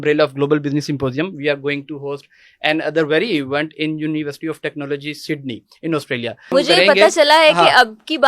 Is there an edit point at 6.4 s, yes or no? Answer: yes